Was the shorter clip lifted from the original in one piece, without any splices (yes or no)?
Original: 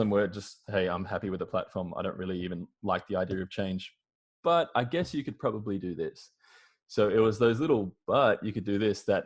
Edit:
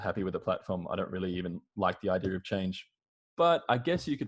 yes